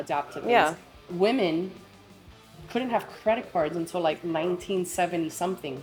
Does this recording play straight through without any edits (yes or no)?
yes